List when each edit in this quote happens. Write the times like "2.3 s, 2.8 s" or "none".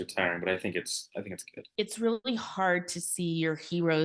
1.6 s